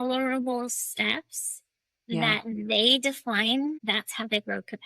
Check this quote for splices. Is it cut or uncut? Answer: cut